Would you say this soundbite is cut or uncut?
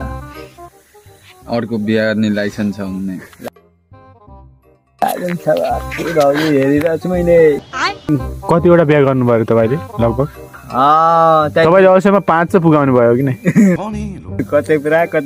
uncut